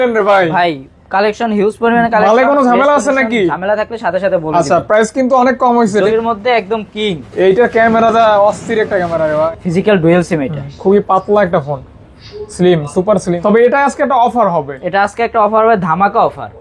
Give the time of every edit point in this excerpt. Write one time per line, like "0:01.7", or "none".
0:06.1
0:09.5
0:13.4